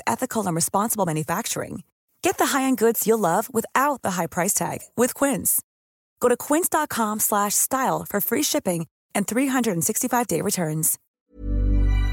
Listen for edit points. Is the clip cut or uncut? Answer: cut